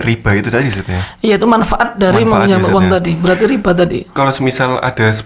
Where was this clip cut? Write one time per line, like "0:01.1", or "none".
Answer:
0:04.1